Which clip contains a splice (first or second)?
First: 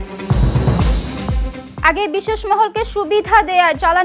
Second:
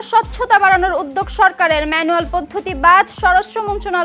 first